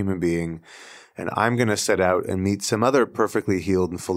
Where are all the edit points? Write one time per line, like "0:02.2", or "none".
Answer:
none